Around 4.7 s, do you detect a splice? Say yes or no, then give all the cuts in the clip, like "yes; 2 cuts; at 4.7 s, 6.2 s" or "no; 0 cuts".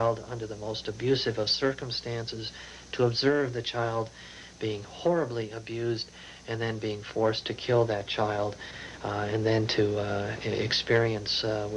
yes; 1 cut; at 4.7 s